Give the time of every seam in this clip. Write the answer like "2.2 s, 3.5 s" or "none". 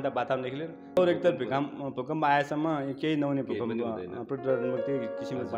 1.0 s